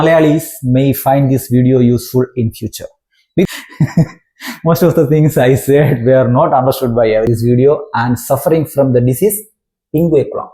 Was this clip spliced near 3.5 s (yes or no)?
yes